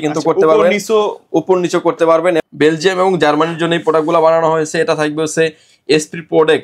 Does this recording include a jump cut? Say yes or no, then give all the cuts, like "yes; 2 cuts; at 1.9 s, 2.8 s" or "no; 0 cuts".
yes; 1 cut; at 2.4 s